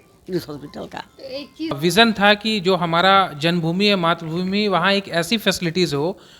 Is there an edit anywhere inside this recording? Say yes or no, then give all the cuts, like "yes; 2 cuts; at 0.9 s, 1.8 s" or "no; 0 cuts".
yes; 1 cut; at 1.8 s